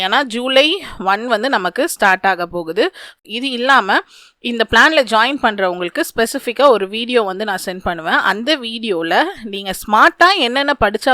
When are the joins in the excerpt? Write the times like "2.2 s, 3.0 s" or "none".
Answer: 3.1 s